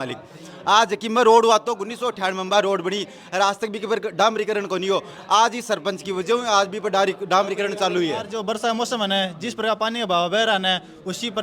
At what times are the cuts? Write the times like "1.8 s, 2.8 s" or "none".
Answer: 8.3 s